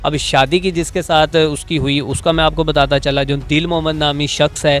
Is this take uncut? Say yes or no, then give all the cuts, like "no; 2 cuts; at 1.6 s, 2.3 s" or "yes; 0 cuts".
yes; 0 cuts